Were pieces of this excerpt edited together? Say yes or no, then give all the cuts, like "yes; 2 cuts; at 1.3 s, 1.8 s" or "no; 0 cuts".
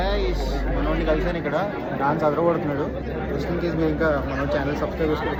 no; 0 cuts